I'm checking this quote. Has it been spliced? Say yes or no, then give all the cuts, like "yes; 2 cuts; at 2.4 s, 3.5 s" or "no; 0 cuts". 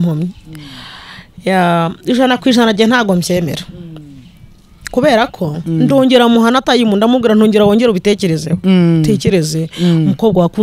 yes; 1 cut; at 5.6 s